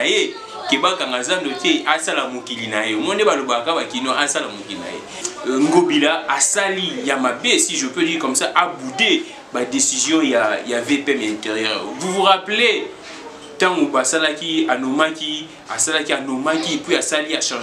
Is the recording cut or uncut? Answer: cut